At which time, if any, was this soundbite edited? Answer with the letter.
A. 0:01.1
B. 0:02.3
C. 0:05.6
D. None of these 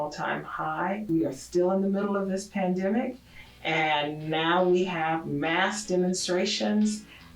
A